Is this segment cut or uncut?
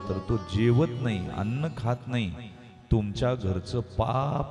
uncut